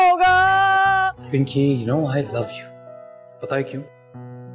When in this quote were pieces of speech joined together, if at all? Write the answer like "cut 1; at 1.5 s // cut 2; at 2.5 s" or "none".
cut 1; at 1.2 s